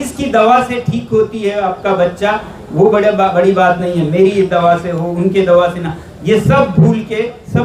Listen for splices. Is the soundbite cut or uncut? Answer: uncut